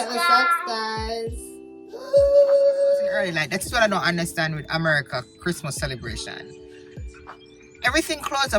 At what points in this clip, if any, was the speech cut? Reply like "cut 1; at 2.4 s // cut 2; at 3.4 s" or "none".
cut 1; at 3.4 s